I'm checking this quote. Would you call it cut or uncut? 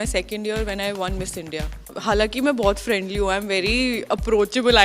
cut